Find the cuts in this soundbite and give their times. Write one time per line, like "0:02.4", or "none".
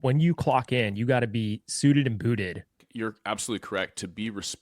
0:02.8